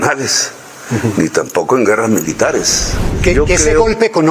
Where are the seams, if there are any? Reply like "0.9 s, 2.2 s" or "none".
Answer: 3.1 s